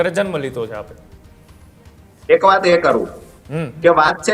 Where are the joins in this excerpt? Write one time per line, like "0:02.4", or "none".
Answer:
none